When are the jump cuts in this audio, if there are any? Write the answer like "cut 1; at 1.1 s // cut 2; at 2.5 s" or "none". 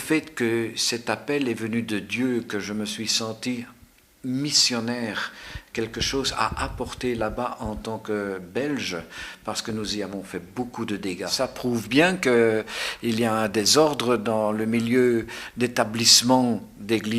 cut 1; at 11.3 s